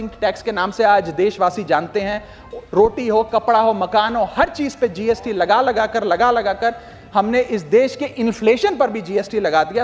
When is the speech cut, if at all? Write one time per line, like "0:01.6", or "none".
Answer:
none